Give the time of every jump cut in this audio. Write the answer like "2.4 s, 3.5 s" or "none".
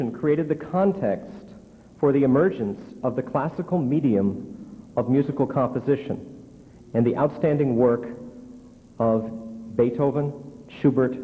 3.3 s